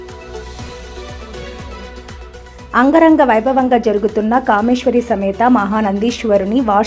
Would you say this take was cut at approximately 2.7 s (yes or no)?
yes